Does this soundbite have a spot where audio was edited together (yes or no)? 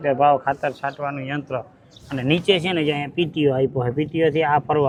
no